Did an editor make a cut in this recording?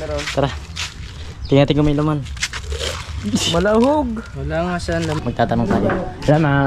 yes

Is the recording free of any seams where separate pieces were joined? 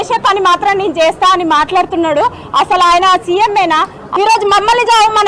no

